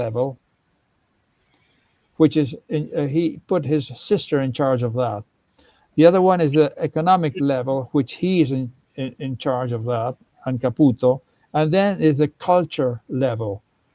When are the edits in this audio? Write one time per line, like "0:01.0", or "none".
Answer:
none